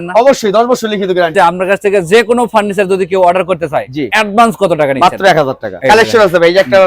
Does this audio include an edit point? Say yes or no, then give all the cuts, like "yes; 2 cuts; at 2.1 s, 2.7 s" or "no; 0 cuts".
yes; 2 cuts; at 1.3 s, 5.8 s